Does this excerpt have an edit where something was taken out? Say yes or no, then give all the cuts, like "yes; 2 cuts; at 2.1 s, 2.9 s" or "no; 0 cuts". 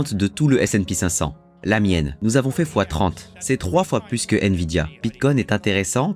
yes; 3 cuts; at 2.1 s, 3.3 s, 4.9 s